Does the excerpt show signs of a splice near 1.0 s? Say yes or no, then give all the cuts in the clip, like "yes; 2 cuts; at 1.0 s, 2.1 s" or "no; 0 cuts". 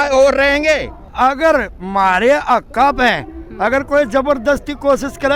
yes; 1 cut; at 1.0 s